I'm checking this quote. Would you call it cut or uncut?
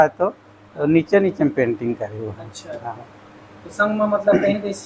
uncut